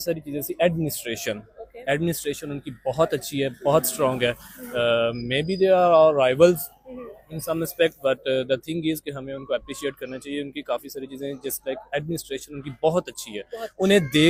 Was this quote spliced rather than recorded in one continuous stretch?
no; 0 cuts

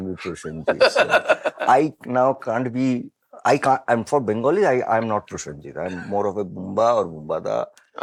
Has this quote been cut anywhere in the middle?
no; 0 cuts

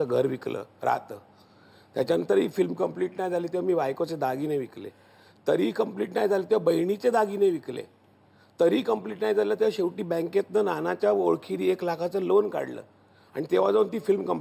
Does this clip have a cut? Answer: no; 0 cuts

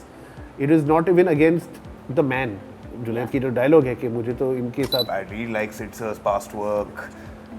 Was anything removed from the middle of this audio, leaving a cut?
yes; 1 cut; at 5.1 s

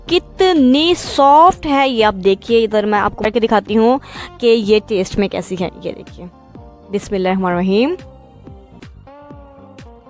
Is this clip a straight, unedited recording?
no; 2 cuts; at 3.2 s, 8.8 s

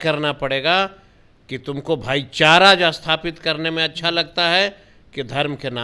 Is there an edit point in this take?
no; 0 cuts

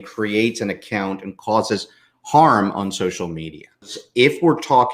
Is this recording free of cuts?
no; 1 cut; at 4.0 s

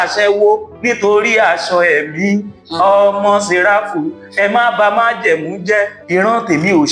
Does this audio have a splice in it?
yes; 1 cut; at 6.0 s

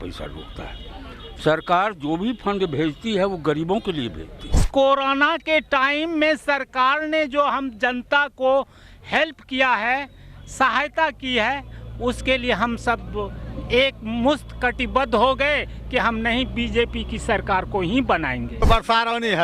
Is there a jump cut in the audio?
yes; 2 cuts; at 4.6 s, 18.6 s

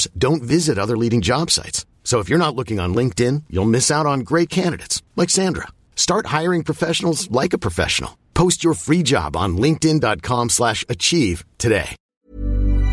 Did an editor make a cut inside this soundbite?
yes; 1 cut; at 12.0 s

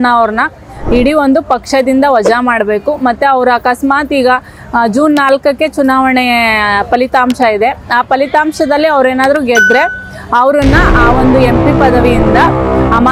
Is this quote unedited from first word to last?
yes; 0 cuts

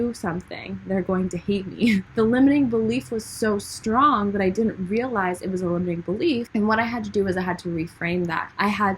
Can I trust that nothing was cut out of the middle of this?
no; 2 cuts; at 2.1 s, 6.5 s

